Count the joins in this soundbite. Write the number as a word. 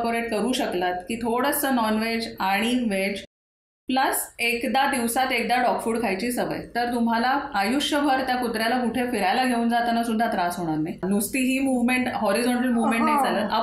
one